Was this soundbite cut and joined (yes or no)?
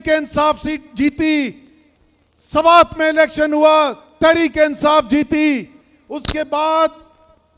no